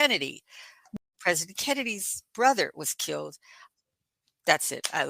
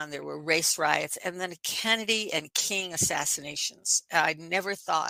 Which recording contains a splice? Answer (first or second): first